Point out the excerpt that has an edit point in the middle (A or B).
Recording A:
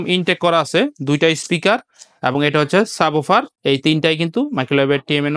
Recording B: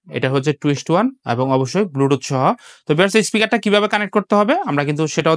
A